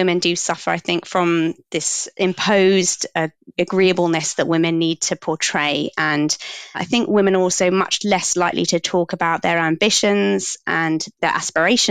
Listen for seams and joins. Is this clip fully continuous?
no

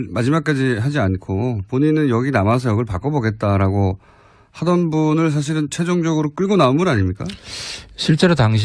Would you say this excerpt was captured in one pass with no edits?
yes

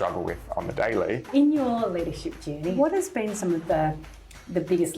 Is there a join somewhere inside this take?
yes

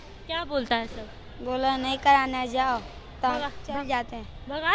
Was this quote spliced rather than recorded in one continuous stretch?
no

